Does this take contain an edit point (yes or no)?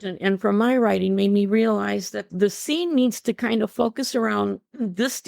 yes